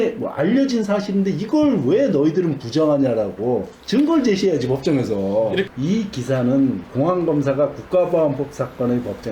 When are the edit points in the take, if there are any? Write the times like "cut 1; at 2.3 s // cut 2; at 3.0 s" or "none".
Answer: cut 1; at 5.7 s

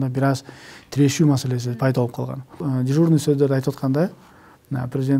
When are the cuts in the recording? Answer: cut 1; at 2.6 s

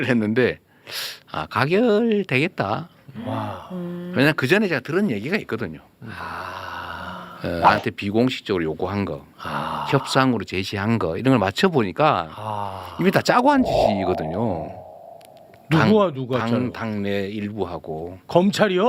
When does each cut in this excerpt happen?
cut 1; at 7.6 s

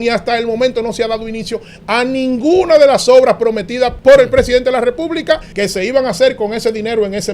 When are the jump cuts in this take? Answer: cut 1; at 3.9 s // cut 2; at 5.5 s

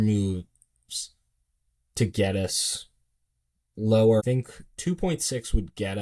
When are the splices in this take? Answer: cut 1; at 4.2 s

